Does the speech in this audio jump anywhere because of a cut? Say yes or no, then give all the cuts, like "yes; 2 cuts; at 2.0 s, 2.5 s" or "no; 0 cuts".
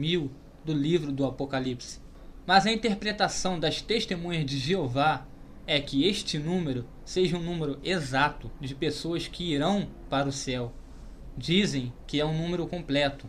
yes; 1 cut; at 6.0 s